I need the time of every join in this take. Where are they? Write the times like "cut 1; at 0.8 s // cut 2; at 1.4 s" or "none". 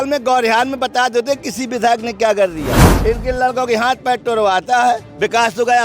cut 1; at 2.9 s